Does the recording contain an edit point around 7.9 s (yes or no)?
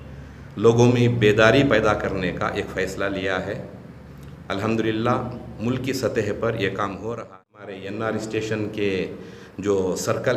yes